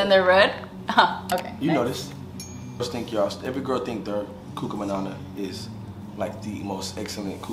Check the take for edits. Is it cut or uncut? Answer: cut